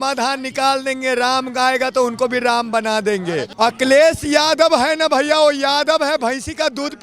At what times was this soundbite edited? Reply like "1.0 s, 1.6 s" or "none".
3.5 s